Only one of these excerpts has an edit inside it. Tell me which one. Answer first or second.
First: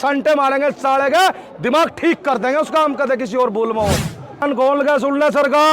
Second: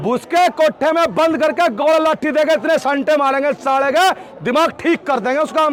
first